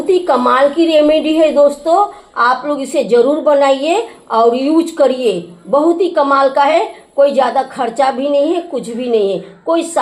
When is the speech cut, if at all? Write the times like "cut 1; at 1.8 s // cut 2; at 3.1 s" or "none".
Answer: none